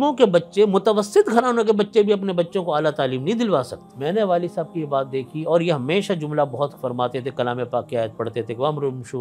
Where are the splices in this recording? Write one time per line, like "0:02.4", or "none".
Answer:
0:03.8